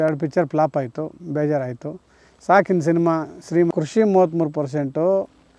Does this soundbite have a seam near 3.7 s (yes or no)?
yes